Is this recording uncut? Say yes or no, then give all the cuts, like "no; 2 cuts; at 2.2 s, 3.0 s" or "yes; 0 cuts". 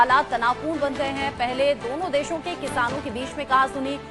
yes; 0 cuts